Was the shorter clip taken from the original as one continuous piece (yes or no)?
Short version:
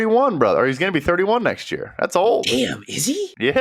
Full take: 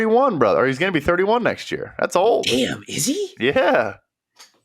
yes